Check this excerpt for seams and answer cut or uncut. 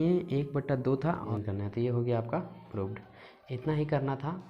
cut